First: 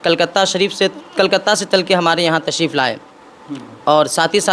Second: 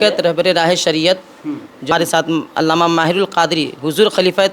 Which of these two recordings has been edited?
second; 1 cut; at 1.9 s

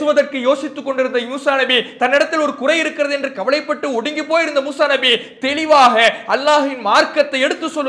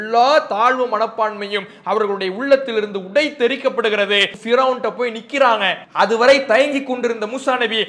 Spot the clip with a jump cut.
second; 2 cuts; at 4.4 s, 5.8 s

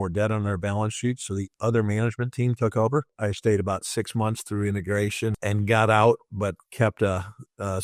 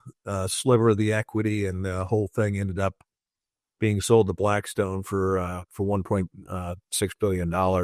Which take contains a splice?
first; 2 cuts; at 3.1 s, 5.4 s

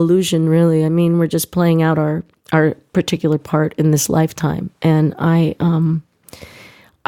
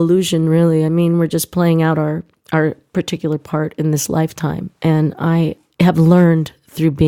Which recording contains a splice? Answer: second; 1 cut; at 5.6 s

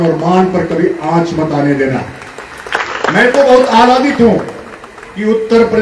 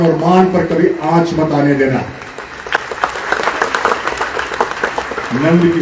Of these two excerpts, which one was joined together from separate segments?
first; 1 cut; at 2.9 s

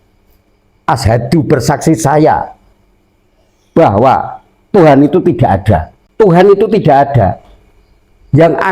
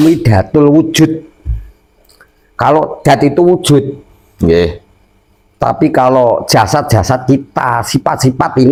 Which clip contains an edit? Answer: first; 1 cut; at 6.0 s

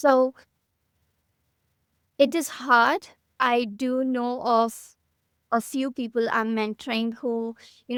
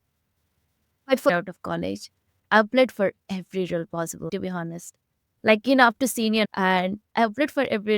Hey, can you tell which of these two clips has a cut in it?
second; 2 cuts; at 1.3 s, 6.5 s

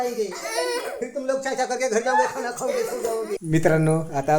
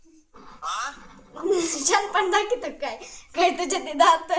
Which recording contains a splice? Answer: first; 1 cut; at 3.4 s

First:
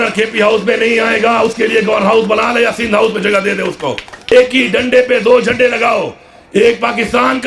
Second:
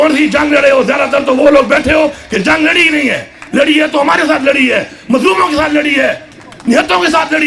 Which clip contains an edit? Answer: first; 1 cut; at 4.3 s

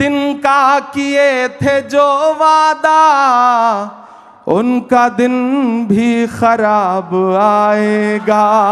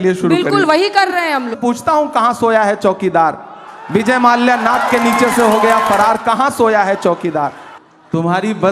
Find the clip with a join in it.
second; 2 cuts; at 1.6 s, 7.7 s

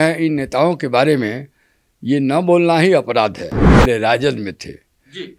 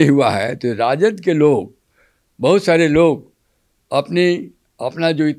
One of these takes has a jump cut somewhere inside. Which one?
first; 1 cut; at 3.6 s

